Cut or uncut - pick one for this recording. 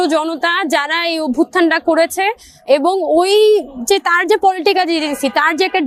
uncut